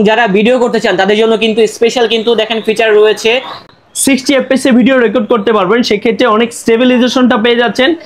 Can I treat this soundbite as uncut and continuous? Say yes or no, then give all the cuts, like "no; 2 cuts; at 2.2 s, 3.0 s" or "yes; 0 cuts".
yes; 0 cuts